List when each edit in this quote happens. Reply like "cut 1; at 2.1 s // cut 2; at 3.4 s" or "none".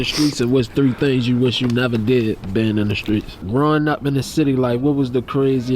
cut 1; at 3.4 s